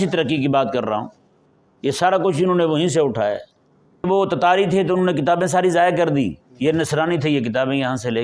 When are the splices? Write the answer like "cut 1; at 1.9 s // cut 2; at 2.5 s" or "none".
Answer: cut 1; at 4.0 s